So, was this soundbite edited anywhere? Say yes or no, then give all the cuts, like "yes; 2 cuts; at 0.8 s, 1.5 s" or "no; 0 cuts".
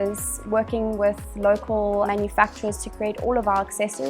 yes; 1 cut; at 2.1 s